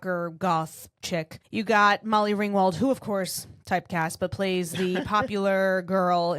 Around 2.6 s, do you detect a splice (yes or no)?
no